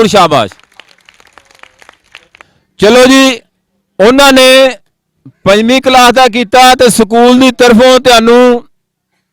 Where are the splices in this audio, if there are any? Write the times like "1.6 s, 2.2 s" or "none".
2.5 s